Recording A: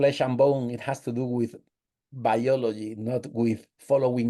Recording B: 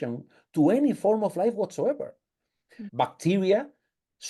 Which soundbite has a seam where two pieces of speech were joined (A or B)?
B